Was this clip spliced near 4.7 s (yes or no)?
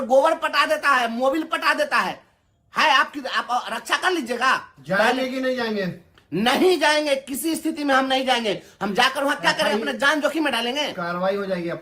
yes